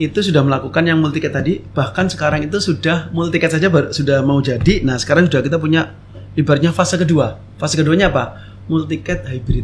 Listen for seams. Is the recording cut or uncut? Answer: uncut